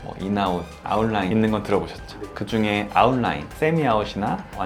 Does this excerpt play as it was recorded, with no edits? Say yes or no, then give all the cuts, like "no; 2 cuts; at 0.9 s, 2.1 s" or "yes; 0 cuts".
yes; 0 cuts